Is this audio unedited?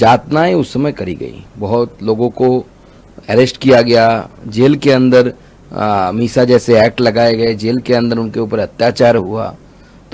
yes; 0 cuts

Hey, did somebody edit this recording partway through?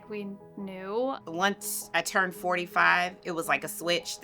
yes; 1 cut; at 1.2 s

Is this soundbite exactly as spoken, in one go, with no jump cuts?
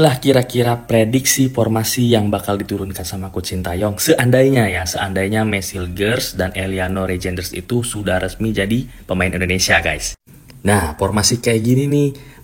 yes; 0 cuts

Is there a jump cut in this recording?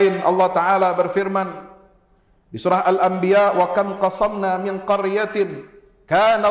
no; 0 cuts

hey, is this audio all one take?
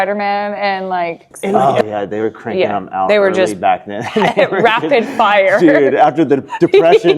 no; 1 cut; at 1.5 s

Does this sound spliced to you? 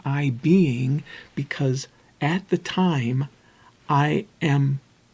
no; 0 cuts

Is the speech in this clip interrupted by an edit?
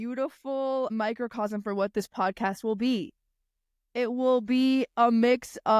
yes; 1 cut; at 0.9 s

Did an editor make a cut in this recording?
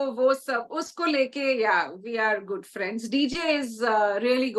no; 0 cuts

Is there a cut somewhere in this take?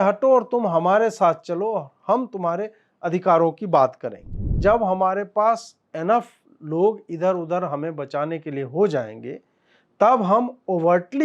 yes; 1 cut; at 4.5 s

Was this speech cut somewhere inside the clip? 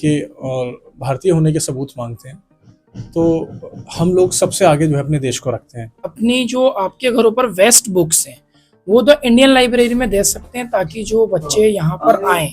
yes; 1 cut; at 6.1 s

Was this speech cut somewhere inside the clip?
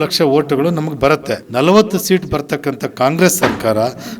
yes; 1 cut; at 1.4 s

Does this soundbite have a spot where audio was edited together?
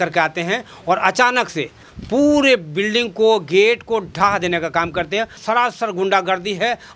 yes; 2 cuts; at 1.9 s, 5.4 s

